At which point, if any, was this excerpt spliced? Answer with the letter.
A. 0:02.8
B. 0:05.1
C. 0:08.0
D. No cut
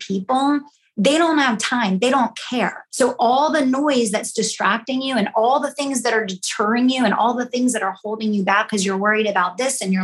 A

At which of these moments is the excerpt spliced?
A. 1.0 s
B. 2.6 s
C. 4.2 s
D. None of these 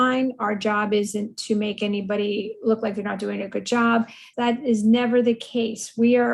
C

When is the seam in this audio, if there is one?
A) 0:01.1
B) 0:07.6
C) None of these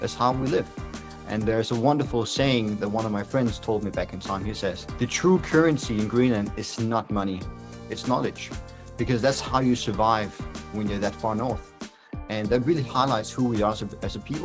C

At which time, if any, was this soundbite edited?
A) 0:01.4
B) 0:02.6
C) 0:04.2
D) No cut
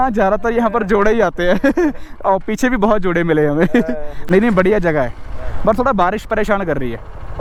D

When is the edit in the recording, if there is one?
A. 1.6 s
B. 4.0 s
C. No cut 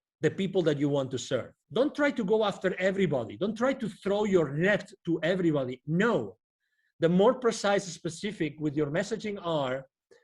A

